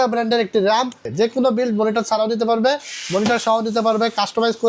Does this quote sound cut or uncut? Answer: cut